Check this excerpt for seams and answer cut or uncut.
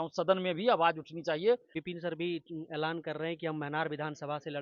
cut